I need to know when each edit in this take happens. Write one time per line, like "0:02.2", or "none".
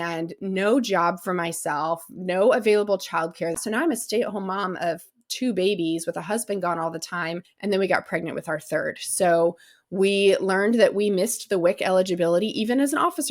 0:03.6
0:07.5